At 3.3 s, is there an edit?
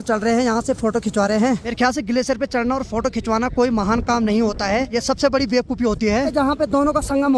no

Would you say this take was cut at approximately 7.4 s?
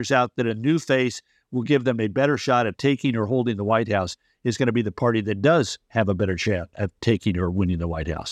no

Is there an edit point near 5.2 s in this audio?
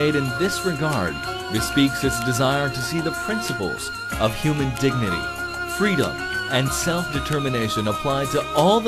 no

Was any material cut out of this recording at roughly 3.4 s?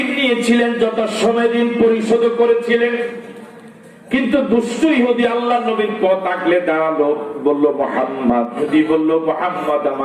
no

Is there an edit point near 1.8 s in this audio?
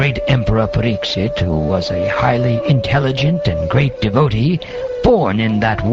no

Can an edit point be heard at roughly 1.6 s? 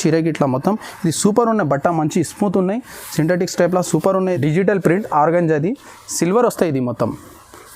no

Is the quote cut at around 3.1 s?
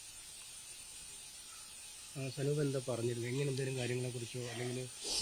no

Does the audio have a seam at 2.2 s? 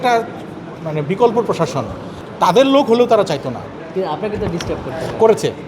yes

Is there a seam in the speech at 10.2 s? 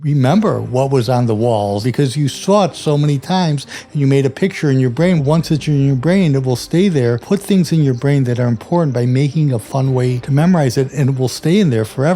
yes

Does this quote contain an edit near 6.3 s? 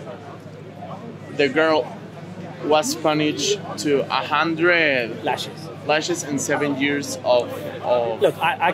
no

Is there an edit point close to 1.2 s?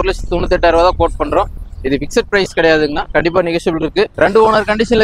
no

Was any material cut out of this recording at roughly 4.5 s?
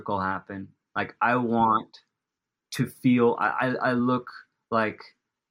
no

